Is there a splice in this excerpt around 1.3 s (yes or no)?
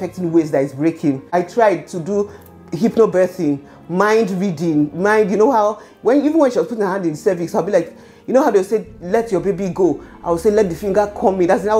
yes